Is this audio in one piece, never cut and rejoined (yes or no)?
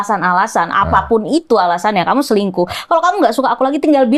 yes